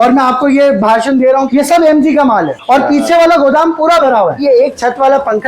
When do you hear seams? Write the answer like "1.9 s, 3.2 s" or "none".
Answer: 1.5 s, 2.6 s, 4.4 s